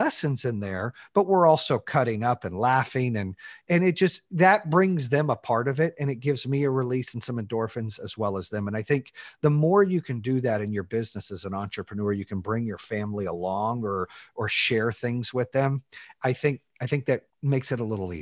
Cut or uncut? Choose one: cut